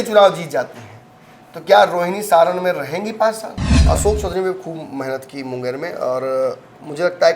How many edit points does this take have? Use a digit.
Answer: 1